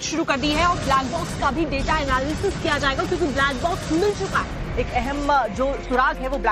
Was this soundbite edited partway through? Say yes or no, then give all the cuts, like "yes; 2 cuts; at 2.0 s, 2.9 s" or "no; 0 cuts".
yes; 1 cut; at 2.0 s